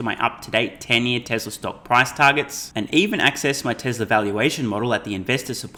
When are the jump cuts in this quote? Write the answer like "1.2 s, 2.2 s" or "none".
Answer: none